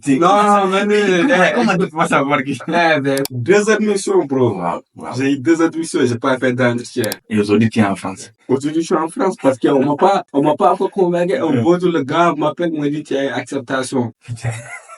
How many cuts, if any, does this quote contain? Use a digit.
2